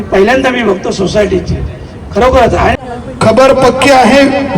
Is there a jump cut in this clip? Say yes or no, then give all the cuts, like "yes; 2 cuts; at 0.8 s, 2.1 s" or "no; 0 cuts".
yes; 1 cut; at 2.8 s